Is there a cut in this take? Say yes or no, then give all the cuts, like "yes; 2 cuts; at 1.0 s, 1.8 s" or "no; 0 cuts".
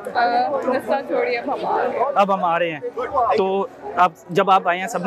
no; 0 cuts